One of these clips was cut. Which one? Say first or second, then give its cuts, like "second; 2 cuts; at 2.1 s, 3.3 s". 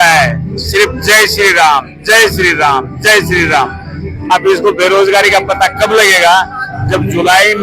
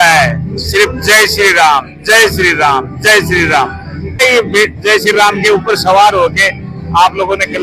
second; 1 cut; at 4.2 s